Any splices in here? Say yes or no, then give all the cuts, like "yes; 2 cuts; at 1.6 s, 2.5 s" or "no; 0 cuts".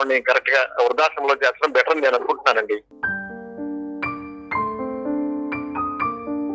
yes; 1 cut; at 2.9 s